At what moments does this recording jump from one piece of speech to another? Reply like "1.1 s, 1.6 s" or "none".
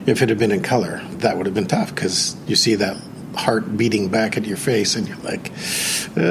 1.1 s